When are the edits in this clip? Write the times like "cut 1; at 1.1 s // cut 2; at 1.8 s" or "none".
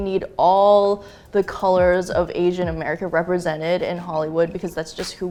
none